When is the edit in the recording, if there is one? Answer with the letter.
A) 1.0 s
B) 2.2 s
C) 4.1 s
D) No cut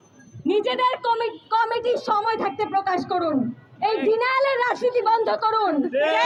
D